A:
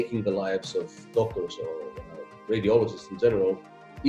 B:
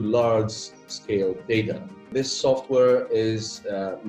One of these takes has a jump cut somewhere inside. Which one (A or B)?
B